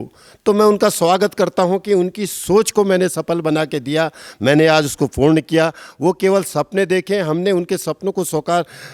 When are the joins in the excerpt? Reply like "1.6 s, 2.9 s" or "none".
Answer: none